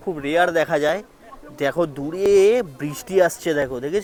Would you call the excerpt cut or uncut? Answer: uncut